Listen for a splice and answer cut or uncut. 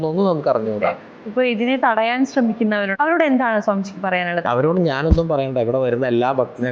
cut